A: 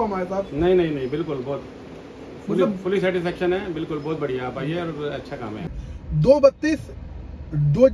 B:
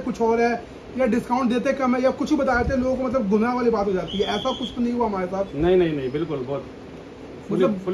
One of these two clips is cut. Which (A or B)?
A